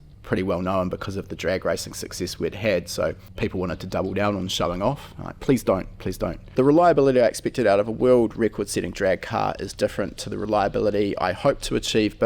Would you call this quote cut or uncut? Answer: cut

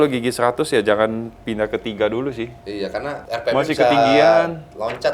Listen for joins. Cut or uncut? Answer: uncut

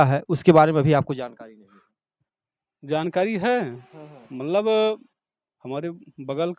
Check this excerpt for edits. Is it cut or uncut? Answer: uncut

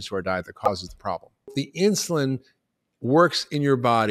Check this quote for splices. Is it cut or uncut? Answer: cut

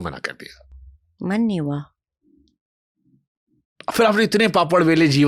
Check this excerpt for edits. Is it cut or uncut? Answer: uncut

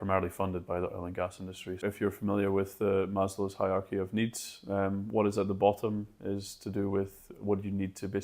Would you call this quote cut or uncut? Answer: cut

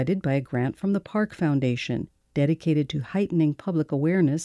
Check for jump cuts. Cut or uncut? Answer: uncut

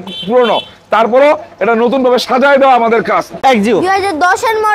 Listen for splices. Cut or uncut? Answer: cut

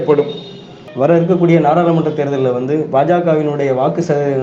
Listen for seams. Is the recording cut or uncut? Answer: uncut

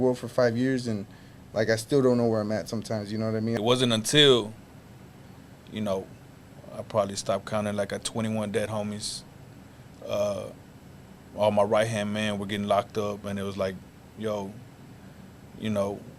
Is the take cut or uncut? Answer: cut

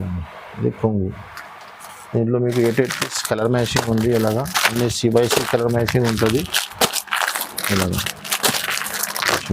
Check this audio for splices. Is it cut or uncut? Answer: uncut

